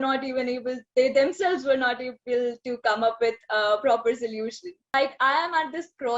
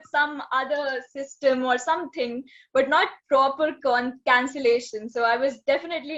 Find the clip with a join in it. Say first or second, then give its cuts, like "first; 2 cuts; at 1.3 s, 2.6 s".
first; 1 cut; at 4.9 s